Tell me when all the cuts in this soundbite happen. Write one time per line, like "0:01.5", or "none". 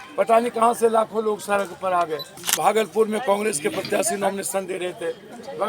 0:02.4

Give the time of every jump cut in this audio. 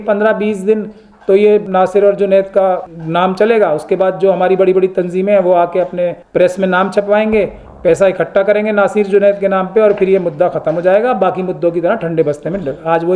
0:01.6
0:02.9
0:06.2

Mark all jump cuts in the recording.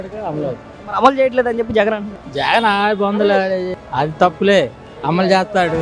0:03.7
0:04.9

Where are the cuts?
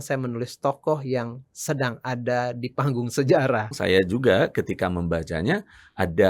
0:03.7

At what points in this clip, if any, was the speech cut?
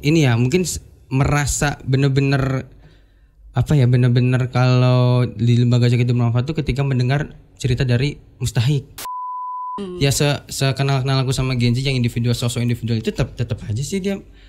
0:09.5

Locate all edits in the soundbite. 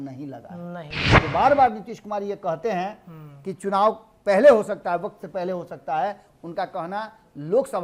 0:01.1

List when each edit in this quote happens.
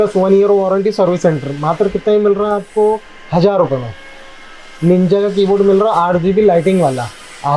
none

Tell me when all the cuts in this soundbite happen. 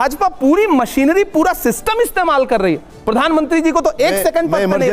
none

